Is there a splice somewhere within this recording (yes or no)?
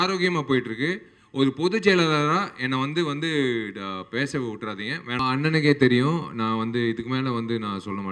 yes